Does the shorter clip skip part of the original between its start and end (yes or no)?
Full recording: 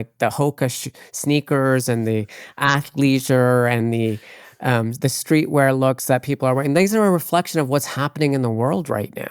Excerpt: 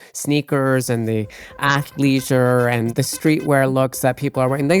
yes